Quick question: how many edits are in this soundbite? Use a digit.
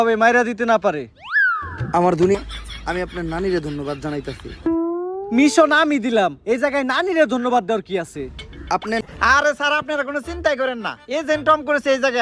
2